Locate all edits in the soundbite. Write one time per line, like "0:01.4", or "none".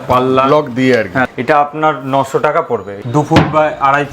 0:01.3
0:02.9